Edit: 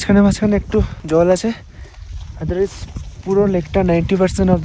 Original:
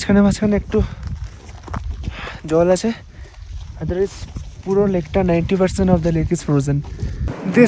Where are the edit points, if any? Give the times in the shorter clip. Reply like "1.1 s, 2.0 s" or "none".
1.0 s